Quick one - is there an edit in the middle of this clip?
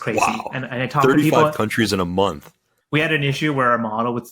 yes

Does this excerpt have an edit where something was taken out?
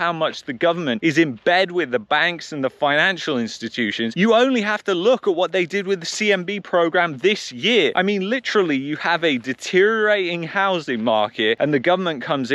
no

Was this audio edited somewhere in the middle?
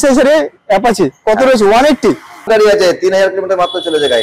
yes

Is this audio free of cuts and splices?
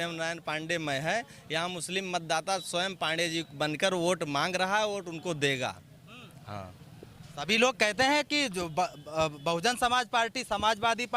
yes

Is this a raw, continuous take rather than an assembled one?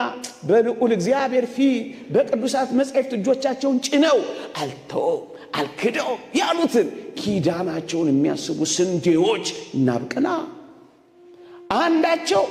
yes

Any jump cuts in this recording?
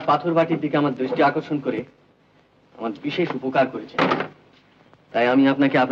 no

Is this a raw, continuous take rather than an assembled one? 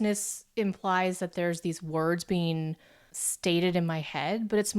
yes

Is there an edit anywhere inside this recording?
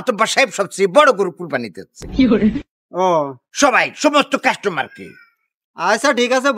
no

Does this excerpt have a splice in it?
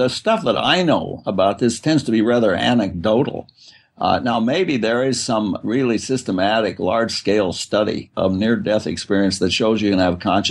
no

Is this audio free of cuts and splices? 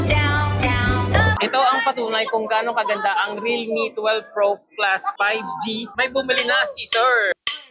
no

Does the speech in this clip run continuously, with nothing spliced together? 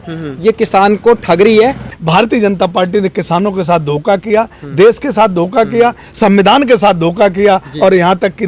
no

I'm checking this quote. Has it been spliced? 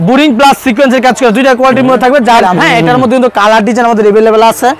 yes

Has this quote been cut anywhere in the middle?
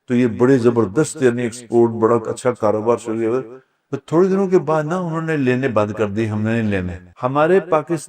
yes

